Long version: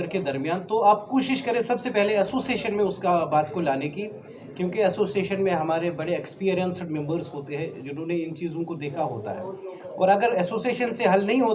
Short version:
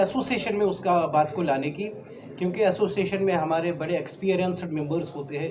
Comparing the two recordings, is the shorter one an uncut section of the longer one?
yes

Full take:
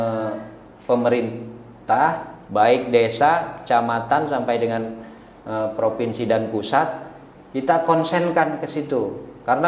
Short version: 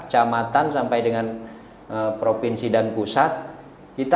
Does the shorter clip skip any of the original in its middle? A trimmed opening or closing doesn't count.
no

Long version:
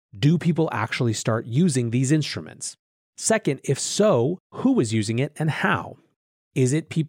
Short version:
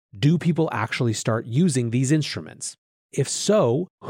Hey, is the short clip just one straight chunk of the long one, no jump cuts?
no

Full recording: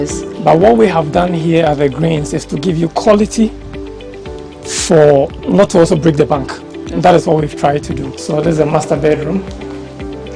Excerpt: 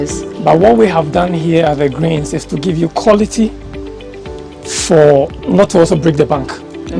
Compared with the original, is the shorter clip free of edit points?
yes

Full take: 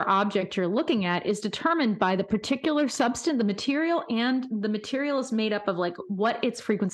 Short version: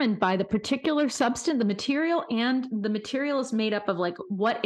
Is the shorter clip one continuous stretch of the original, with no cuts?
yes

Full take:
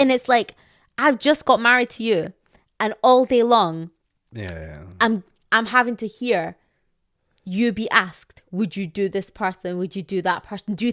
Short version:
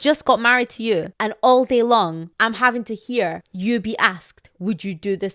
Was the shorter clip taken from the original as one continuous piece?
no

